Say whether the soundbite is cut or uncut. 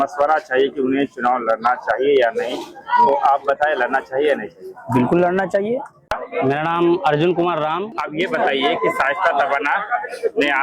cut